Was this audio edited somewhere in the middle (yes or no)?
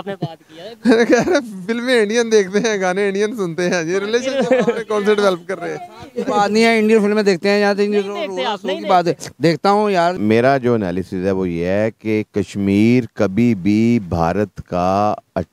yes